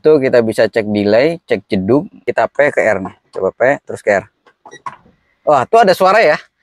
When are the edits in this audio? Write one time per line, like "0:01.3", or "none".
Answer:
0:02.3

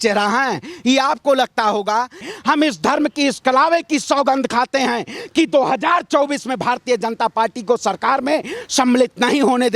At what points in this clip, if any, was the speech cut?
0:02.3

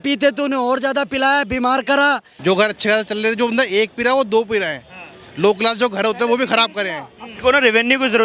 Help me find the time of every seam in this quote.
0:02.3
0:07.3

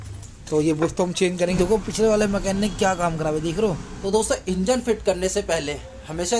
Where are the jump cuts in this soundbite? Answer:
0:01.5
0:04.4

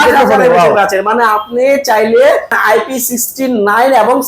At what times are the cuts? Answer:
0:02.6

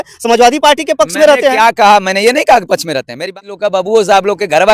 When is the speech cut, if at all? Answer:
0:03.3

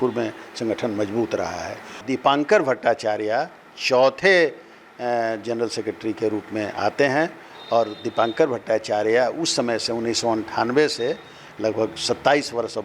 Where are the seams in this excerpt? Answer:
0:02.0

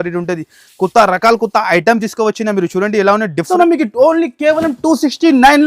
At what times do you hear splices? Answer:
0:03.5

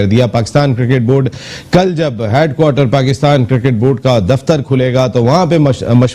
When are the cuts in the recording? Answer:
none

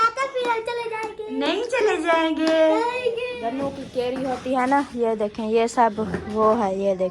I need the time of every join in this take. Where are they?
0:03.3

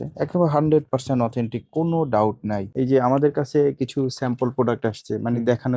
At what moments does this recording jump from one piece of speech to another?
0:02.7

